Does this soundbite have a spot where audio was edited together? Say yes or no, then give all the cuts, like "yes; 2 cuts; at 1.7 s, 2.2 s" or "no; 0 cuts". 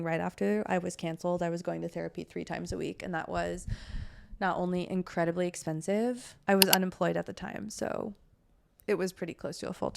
yes; 1 cut; at 6.3 s